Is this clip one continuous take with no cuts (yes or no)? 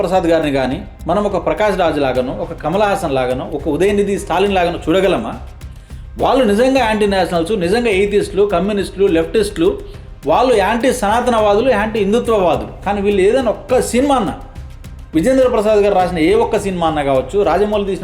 no